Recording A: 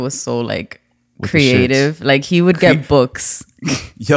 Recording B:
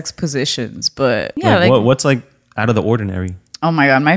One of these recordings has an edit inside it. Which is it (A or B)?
B